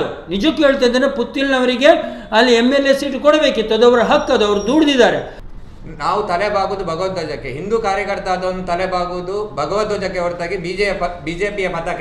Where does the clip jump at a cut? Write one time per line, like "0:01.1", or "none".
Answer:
0:05.3